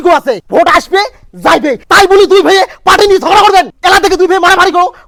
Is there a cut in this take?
no; 0 cuts

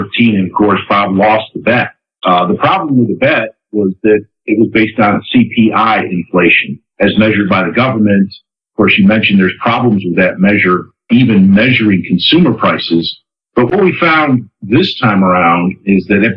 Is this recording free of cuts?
no; 1 cut; at 15.2 s

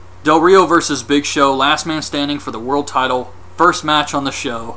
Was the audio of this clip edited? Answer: yes; 1 cut; at 2.4 s

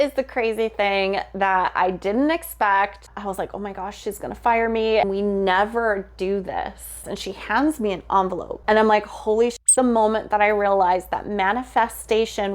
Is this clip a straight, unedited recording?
no; 4 cuts; at 3.1 s, 5.0 s, 7.0 s, 9.6 s

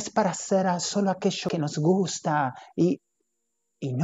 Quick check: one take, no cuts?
no; 1 cut; at 1.5 s

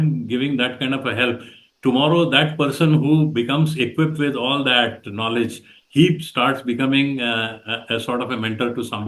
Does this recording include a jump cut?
no; 0 cuts

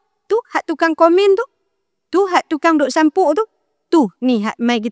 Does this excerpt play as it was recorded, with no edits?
yes; 0 cuts

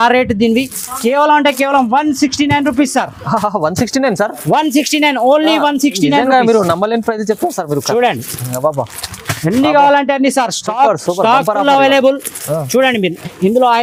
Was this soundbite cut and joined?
no; 0 cuts

